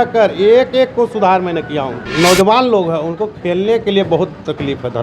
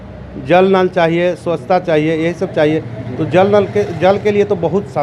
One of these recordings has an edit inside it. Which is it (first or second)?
first